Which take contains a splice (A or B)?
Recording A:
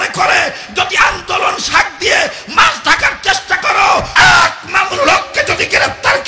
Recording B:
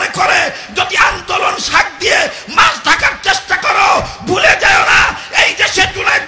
A